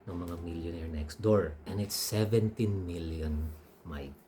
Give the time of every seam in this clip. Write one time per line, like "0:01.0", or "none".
0:01.6